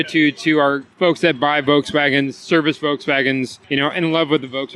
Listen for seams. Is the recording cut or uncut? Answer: cut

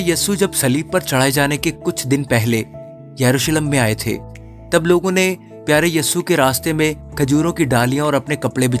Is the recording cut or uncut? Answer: uncut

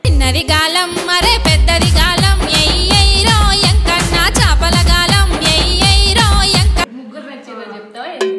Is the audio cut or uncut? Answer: uncut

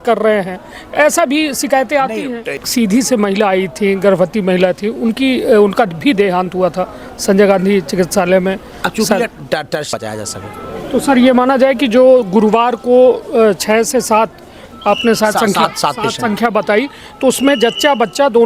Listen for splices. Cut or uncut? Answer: cut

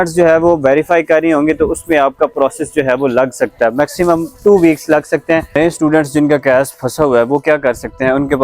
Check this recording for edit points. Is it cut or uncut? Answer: cut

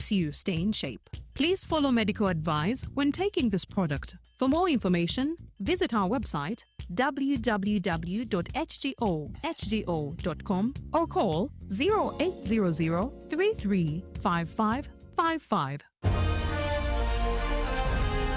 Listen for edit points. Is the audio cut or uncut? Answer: cut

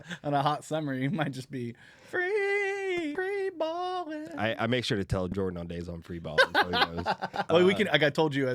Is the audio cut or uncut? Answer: cut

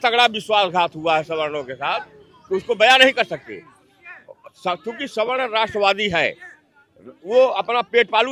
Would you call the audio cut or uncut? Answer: uncut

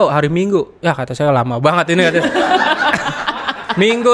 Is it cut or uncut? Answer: uncut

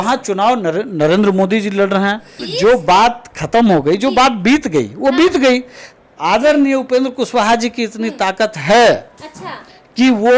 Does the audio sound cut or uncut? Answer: cut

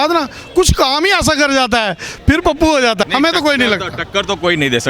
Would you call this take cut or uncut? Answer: cut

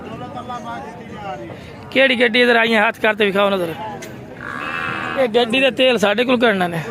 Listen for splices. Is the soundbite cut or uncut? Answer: cut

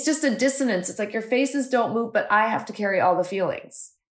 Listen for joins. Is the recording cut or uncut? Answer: uncut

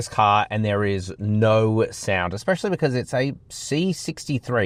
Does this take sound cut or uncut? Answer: uncut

